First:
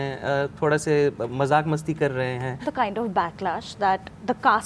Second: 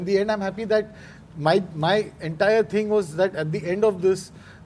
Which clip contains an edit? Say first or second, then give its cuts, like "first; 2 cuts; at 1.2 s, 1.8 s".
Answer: first; 1 cut; at 2.7 s